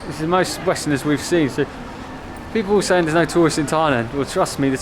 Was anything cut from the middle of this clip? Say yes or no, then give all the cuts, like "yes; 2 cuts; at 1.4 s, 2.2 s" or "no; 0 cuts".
no; 0 cuts